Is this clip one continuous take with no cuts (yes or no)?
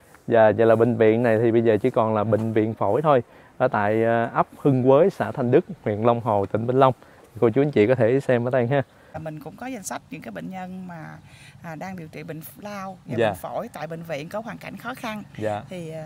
no